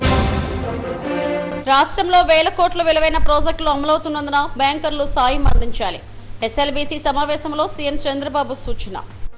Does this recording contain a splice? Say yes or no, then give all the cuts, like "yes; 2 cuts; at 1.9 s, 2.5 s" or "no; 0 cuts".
yes; 1 cut; at 1.3 s